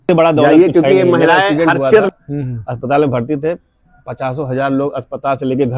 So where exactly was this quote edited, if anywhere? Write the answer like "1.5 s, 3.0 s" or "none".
2.1 s